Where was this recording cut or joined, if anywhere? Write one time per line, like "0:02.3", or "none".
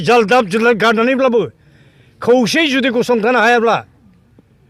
none